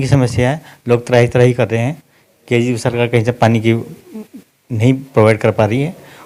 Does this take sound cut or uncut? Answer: uncut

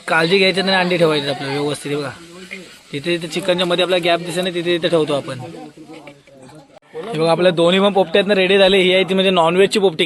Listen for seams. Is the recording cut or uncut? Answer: cut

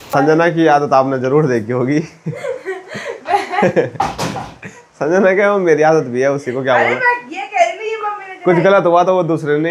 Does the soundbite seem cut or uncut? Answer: uncut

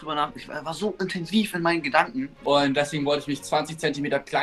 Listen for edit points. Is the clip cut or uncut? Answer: cut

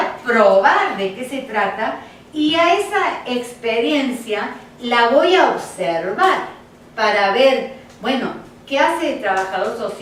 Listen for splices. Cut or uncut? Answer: uncut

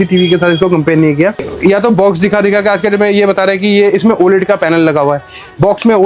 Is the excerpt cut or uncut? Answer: cut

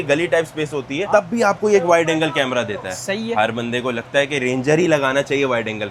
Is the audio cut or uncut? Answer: uncut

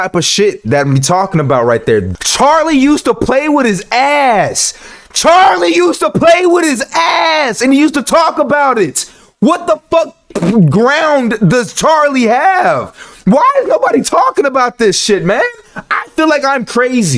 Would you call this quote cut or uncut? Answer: cut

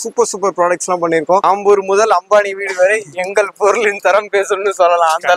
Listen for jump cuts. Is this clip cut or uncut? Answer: cut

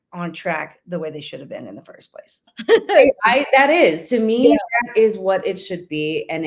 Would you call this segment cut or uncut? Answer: cut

